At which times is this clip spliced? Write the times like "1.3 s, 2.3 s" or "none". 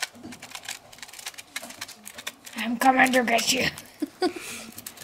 none